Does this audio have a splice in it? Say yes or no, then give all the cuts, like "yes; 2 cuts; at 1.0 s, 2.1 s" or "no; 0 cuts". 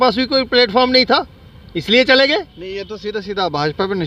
no; 0 cuts